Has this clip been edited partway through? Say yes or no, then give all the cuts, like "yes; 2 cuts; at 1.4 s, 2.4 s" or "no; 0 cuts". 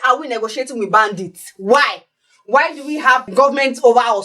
yes; 1 cut; at 3.3 s